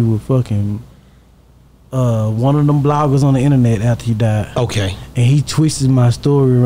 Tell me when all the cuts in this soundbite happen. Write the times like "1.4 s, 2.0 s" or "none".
none